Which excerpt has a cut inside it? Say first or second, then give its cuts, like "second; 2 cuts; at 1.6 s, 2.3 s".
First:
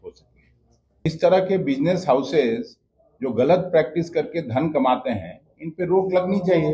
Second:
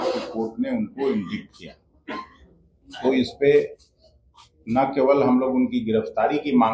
first; 1 cut; at 1.1 s